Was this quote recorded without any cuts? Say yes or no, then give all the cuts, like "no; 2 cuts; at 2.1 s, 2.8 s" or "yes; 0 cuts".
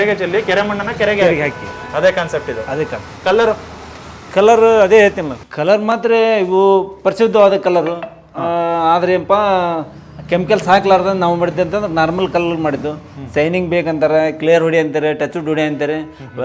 yes; 0 cuts